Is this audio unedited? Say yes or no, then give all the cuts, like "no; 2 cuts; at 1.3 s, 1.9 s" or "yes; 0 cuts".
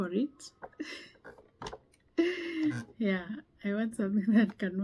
yes; 0 cuts